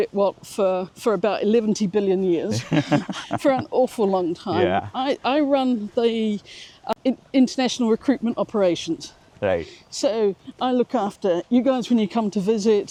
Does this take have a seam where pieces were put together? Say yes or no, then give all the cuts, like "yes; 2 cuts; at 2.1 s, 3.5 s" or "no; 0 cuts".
no; 0 cuts